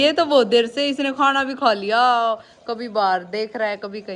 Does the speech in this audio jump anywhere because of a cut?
no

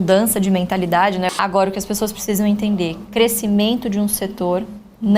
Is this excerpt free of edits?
no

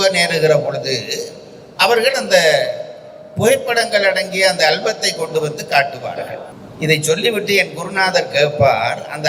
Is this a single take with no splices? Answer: yes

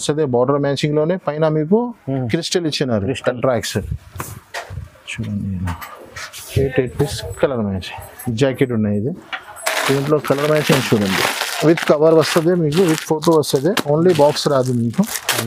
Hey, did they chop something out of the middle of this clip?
no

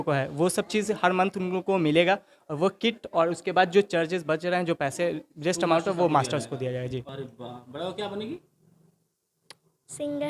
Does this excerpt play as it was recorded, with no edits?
no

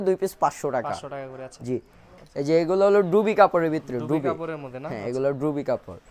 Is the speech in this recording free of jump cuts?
yes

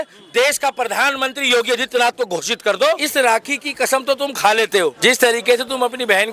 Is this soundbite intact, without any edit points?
no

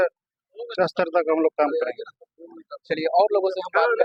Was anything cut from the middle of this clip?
no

